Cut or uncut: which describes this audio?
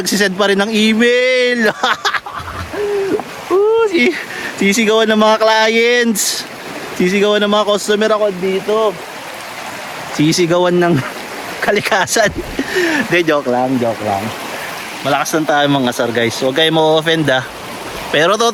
uncut